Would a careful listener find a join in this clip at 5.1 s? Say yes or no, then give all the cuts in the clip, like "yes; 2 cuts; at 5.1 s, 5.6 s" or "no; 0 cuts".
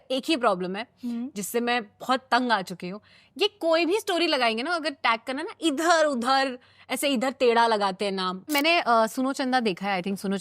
no; 1 cut; at 8.5 s